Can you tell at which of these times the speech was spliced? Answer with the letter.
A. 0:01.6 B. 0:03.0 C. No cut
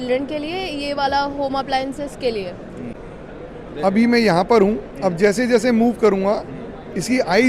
B